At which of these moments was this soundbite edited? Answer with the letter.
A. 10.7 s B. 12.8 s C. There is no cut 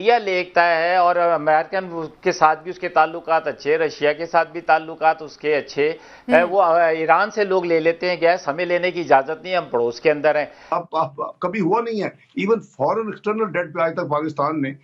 A